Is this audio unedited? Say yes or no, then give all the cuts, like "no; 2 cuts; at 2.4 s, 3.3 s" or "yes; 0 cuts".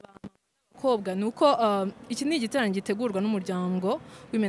yes; 0 cuts